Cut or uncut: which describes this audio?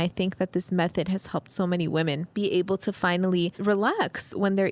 cut